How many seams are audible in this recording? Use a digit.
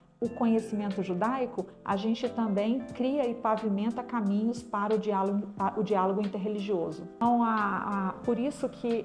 1